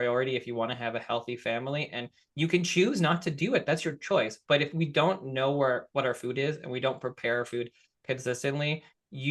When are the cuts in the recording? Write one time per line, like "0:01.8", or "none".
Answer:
none